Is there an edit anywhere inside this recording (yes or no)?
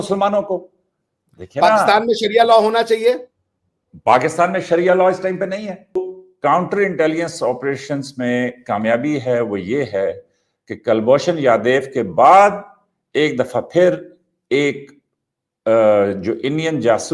yes